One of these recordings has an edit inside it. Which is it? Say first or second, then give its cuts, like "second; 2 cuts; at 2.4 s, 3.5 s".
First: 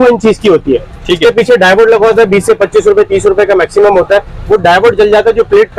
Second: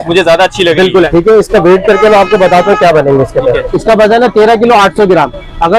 second; 2 cuts; at 1.1 s, 3.7 s